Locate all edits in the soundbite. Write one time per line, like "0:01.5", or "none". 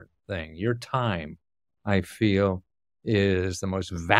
none